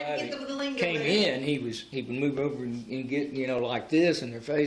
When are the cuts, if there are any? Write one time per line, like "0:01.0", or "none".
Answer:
none